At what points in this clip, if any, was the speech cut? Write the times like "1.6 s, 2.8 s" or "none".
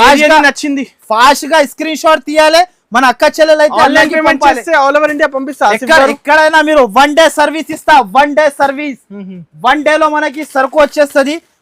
none